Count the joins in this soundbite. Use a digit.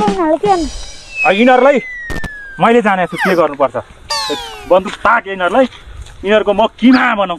0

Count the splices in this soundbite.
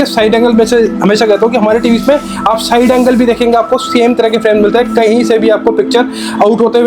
0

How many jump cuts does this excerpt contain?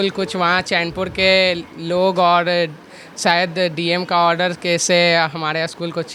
0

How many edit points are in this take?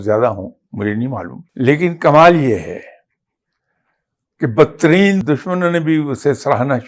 2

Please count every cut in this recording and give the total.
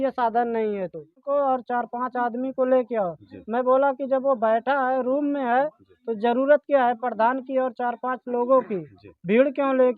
1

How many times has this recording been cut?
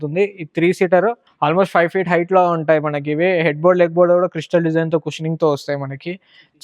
1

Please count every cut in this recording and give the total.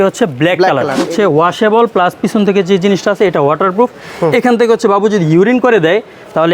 1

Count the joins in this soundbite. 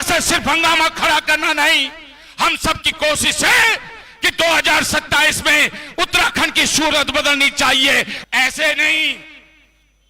1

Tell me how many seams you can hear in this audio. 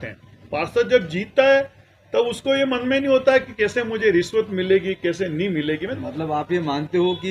1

